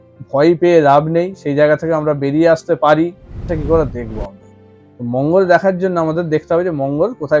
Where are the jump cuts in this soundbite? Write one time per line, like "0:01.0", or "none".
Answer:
0:03.5